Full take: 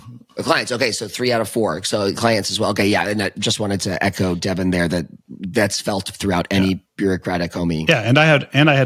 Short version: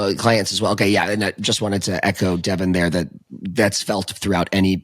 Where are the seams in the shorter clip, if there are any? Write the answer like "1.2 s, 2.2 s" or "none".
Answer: none